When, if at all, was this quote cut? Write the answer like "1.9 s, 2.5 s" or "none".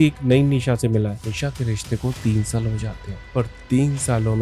1.2 s

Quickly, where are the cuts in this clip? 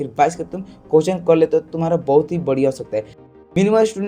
3.2 s

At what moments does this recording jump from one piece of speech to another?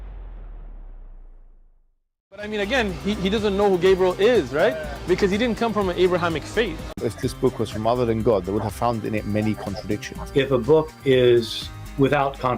6.9 s

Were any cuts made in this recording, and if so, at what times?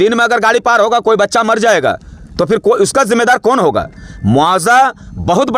none

